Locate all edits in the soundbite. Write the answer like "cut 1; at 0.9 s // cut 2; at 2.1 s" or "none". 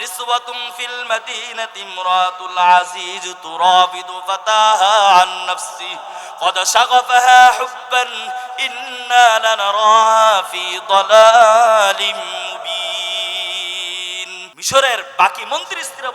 cut 1; at 14.5 s